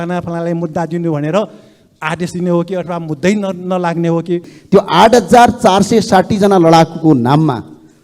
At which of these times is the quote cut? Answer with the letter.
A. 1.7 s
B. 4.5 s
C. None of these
B